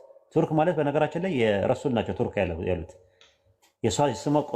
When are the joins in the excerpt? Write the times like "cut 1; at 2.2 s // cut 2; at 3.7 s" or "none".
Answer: none